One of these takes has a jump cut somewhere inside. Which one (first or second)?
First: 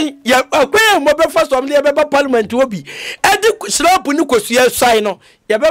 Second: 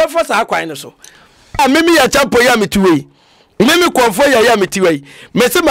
second